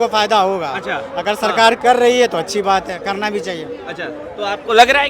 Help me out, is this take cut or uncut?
uncut